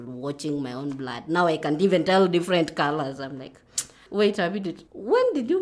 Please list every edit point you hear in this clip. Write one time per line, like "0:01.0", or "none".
0:04.0